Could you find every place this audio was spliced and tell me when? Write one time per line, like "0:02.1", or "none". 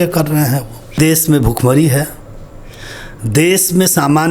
0:01.0